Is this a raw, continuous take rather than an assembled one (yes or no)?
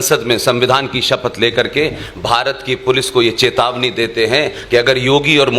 yes